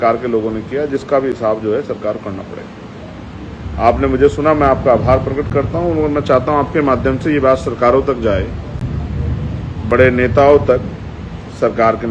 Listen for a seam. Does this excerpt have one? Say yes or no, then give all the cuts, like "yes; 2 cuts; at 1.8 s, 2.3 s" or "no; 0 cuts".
no; 0 cuts